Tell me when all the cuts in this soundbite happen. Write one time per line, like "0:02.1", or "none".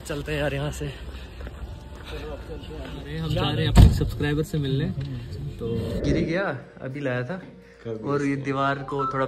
0:03.2
0:06.0